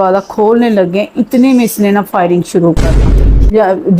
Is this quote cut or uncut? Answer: cut